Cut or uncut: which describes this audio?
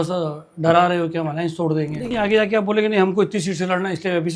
cut